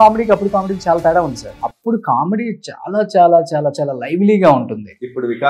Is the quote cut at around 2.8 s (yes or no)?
no